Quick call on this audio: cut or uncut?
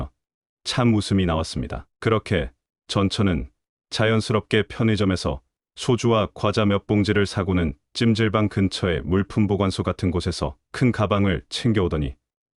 uncut